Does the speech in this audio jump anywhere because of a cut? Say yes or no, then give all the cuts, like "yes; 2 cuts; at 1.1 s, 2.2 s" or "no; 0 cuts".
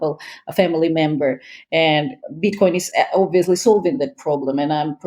no; 0 cuts